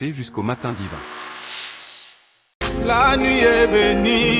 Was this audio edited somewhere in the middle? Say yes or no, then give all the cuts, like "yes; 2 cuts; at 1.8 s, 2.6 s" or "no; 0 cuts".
yes; 1 cut; at 2.5 s